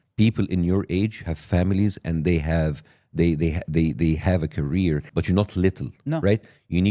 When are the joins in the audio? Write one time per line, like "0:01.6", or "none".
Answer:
0:05.1